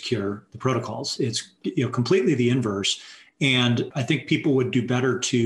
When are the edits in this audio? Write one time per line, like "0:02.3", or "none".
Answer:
0:01.1
0:03.9